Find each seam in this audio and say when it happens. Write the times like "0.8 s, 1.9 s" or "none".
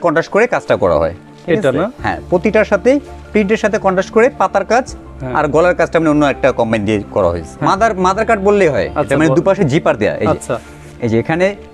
7.5 s